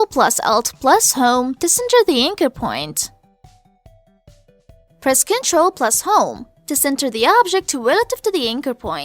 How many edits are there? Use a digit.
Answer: 2